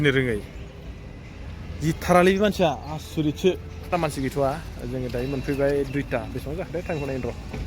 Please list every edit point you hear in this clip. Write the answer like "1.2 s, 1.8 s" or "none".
3.9 s